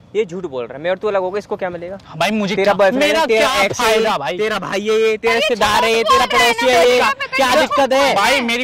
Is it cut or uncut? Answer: uncut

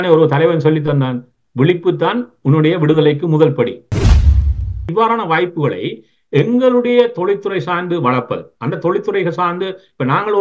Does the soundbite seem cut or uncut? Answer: cut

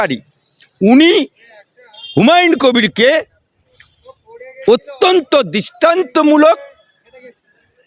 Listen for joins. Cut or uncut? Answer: uncut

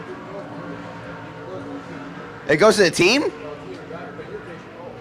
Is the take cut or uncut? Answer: uncut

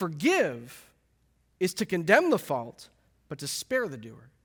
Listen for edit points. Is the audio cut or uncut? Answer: uncut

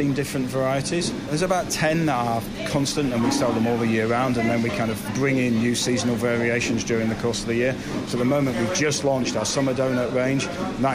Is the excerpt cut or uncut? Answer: uncut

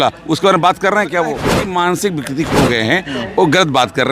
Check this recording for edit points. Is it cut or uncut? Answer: cut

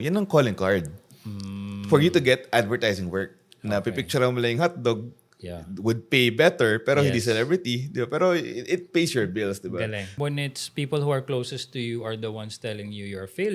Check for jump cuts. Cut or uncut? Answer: cut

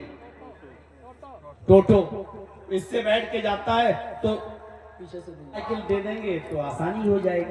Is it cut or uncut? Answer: cut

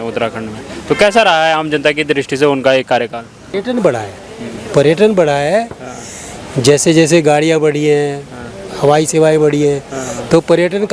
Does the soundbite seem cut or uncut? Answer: uncut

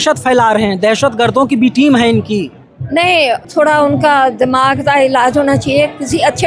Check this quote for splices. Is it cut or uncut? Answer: cut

